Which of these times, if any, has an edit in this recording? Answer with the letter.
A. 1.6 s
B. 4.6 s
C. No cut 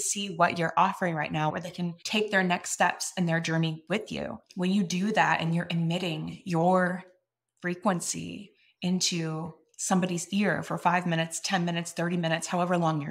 A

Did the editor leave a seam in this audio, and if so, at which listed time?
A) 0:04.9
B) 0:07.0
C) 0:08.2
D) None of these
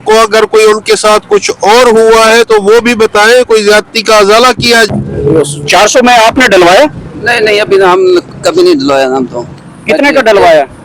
A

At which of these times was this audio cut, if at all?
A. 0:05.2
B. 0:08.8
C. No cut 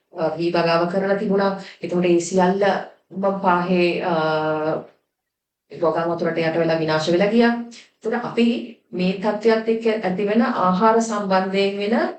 C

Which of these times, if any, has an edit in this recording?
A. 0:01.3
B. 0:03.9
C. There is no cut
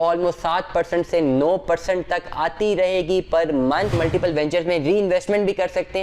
B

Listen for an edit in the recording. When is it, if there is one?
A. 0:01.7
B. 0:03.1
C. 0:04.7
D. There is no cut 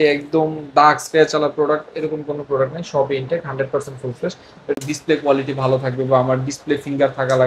C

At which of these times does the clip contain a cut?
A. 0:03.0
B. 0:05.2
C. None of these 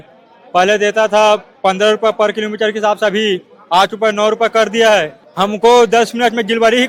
B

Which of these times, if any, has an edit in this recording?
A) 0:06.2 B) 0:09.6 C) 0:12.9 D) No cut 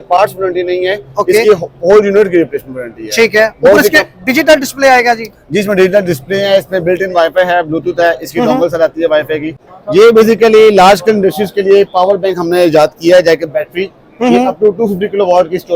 B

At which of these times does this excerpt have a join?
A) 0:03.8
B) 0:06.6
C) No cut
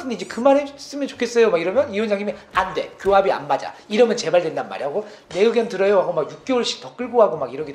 C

